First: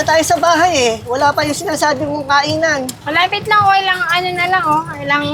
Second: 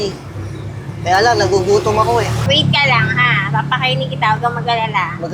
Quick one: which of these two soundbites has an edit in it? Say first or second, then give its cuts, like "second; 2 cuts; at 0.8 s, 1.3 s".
second; 1 cut; at 2.5 s